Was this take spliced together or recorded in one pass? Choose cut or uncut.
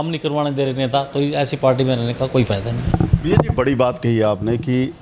uncut